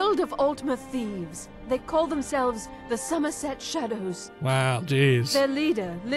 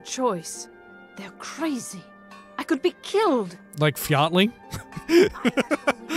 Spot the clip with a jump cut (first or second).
second